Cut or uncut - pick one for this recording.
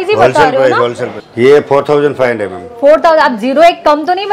cut